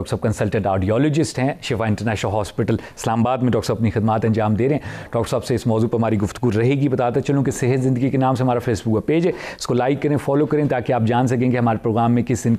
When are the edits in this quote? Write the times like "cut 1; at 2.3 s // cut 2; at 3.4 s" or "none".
none